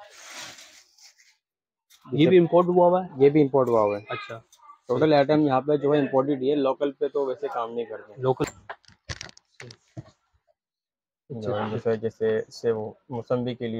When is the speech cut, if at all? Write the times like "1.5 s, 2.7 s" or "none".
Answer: 8.4 s

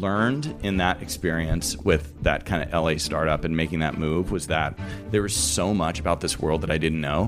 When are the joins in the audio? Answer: none

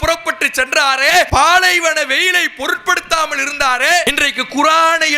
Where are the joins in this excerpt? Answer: 1.3 s, 4.0 s

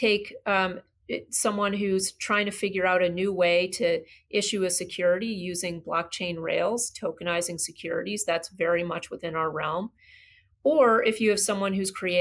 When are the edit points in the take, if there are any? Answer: none

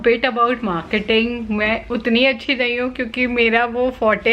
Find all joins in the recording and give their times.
1.8 s

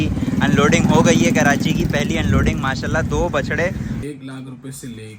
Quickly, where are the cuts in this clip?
4.0 s

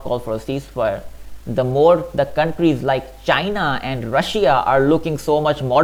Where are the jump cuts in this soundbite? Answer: none

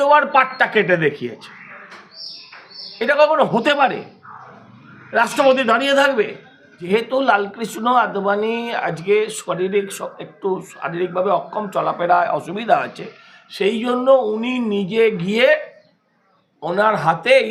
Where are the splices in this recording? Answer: 6.8 s

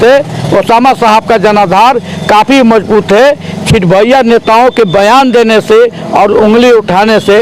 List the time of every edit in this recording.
none

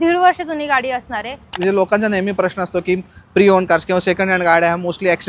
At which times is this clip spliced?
1.4 s

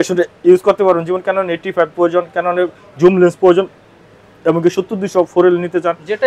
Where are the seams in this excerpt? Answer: none

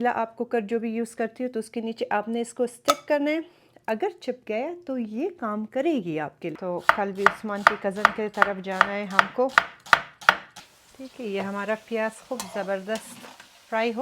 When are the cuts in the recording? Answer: 6.6 s, 10.5 s

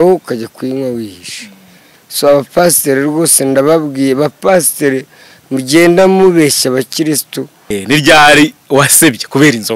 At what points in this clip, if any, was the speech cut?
7.7 s

